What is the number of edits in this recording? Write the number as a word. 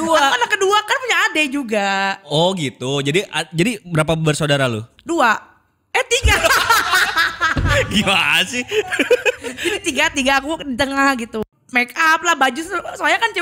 one